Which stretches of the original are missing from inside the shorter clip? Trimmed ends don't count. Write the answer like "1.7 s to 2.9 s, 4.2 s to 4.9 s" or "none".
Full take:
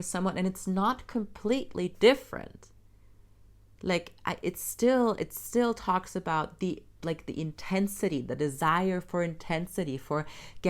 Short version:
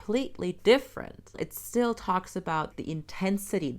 2.7 s to 5.2 s, 6.5 s to 7.2 s